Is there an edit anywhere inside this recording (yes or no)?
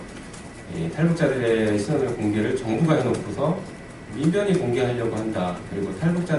no